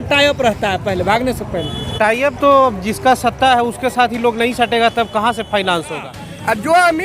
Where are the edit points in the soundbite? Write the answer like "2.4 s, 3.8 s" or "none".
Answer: 6.1 s